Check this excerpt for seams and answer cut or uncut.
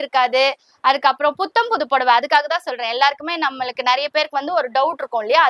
uncut